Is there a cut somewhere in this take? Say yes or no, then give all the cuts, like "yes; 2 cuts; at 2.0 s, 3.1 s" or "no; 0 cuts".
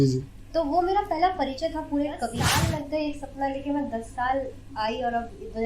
yes; 1 cut; at 2.4 s